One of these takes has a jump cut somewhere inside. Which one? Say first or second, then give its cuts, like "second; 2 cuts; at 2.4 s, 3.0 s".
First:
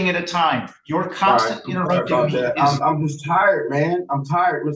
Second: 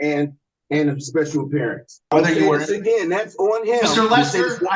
second; 1 cut; at 2.1 s